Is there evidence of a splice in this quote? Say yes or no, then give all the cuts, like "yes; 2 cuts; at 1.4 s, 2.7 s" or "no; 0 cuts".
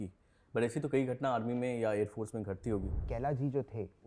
yes; 1 cut; at 3.0 s